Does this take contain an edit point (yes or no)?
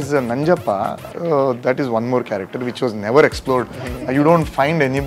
no